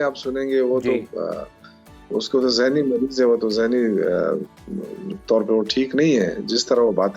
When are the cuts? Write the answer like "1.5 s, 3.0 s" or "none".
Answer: none